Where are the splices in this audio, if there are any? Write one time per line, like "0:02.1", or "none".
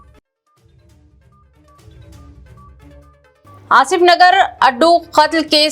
0:02.9